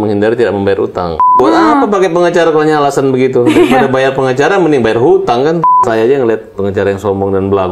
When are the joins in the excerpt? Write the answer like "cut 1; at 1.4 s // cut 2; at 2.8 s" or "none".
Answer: cut 1; at 1.3 s // cut 2; at 5.6 s